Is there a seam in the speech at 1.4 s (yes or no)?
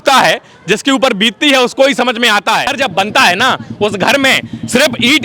no